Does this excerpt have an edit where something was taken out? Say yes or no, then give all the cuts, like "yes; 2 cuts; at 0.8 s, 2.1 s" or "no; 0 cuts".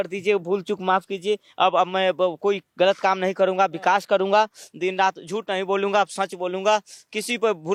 no; 0 cuts